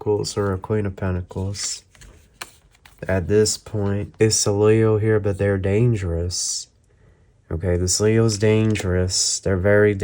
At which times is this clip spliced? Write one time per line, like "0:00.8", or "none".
0:04.1